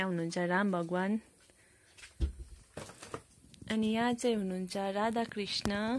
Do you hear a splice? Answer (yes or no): no